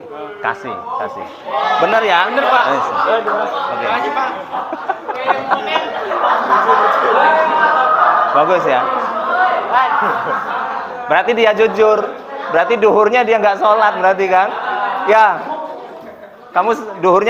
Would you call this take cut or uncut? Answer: uncut